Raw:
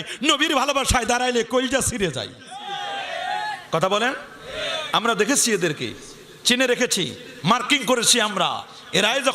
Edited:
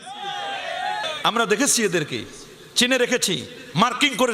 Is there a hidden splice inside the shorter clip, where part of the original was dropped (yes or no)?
yes